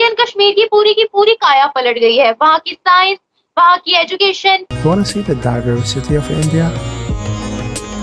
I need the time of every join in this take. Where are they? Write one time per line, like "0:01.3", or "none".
0:04.7